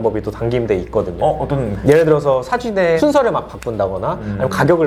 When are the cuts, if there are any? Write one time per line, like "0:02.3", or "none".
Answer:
none